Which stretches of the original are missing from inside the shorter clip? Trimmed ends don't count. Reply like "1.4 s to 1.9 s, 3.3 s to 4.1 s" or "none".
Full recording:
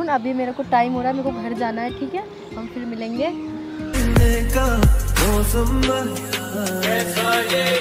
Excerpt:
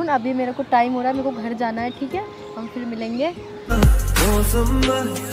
3.7 s to 4.7 s